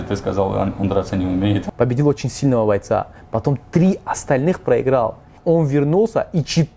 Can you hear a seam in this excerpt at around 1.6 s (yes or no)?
yes